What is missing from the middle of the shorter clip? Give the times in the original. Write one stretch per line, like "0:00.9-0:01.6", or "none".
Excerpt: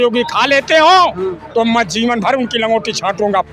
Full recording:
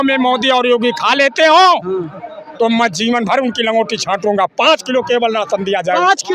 0:02.1-0:02.4